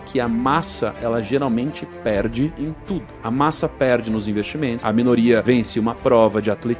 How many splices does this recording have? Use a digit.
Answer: 3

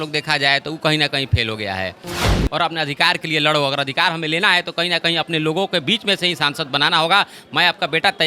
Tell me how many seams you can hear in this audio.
1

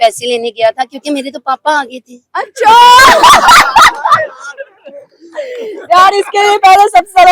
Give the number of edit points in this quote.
0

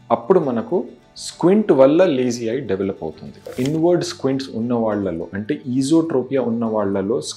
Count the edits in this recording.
1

